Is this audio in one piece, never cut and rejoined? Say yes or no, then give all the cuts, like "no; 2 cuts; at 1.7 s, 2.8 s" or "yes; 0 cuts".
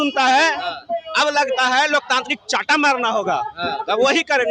yes; 0 cuts